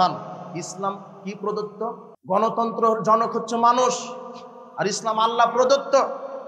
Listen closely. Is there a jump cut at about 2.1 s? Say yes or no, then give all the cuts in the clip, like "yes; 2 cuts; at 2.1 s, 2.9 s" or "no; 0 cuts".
yes; 1 cut; at 2.1 s